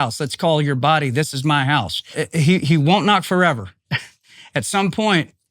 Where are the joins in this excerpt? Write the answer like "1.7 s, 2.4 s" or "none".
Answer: 2.1 s